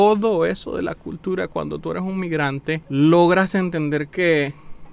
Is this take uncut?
yes; 0 cuts

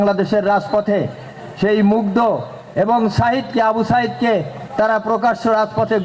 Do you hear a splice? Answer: no; 0 cuts

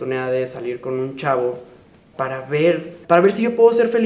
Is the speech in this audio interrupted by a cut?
yes; 1 cut; at 2.9 s

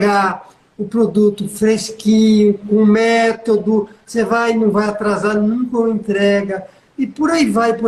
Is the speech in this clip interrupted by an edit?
no; 0 cuts

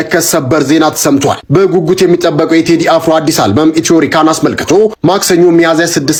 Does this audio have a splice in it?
no; 0 cuts

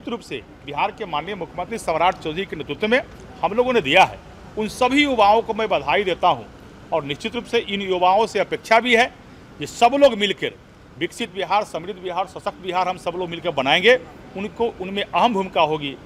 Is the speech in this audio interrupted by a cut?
no; 0 cuts

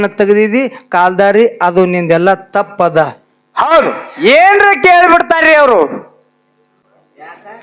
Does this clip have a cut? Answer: no; 0 cuts

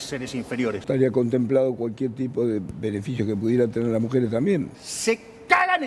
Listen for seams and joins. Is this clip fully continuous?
no; 2 cuts; at 0.9 s, 4.8 s

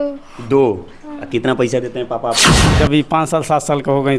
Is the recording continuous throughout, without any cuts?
no; 1 cut; at 2.7 s

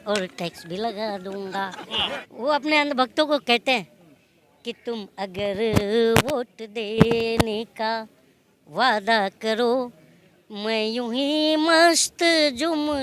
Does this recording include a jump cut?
yes; 1 cut; at 1.9 s

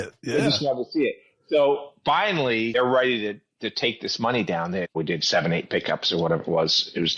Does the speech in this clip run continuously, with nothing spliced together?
no; 2 cuts; at 2.7 s, 4.9 s

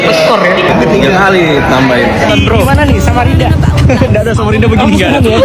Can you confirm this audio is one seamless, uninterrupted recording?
yes; 0 cuts

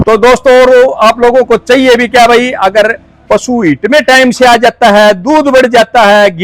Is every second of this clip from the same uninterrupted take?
yes; 0 cuts

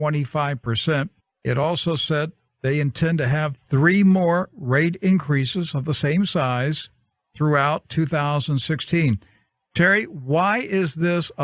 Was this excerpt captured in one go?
yes; 0 cuts

